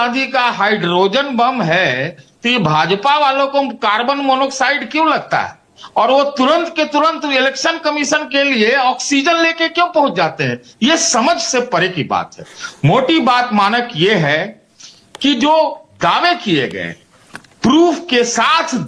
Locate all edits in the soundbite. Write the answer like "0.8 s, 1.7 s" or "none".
none